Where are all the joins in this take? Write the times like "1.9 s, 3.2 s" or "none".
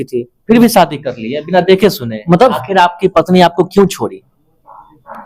2.5 s